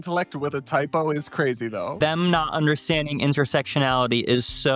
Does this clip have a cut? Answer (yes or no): yes